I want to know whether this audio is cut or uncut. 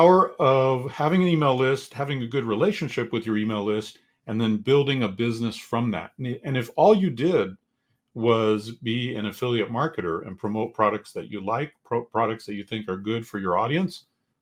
uncut